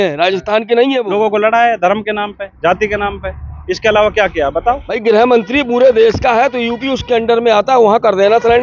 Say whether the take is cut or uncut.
cut